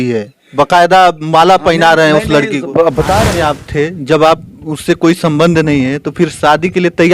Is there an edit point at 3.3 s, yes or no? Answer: yes